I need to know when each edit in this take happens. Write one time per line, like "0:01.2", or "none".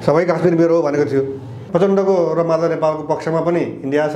0:01.6

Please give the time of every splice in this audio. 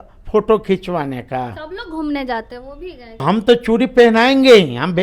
0:03.2

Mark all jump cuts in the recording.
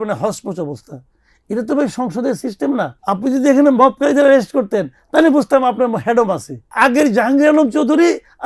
0:03.0
0:06.7

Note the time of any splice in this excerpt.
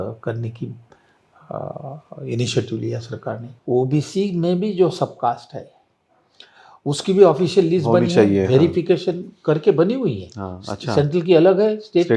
0:03.5

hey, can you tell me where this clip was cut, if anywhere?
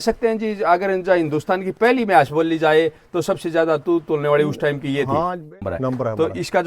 0:05.5

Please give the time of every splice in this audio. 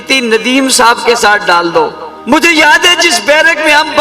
0:02.1

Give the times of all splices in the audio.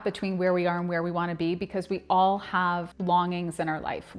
0:02.9

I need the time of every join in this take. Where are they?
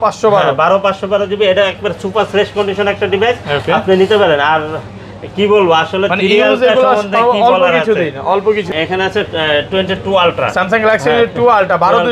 0:08.7

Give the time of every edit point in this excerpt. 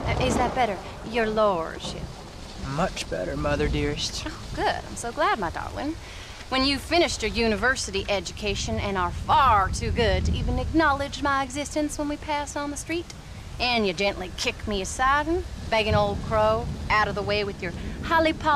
0:10.2

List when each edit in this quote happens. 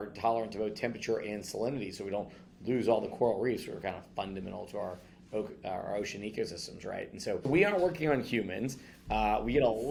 none

